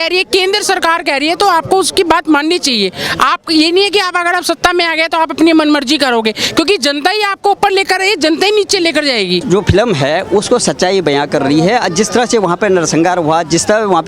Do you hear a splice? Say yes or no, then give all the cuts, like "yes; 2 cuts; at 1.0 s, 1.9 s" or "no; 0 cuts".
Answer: no; 0 cuts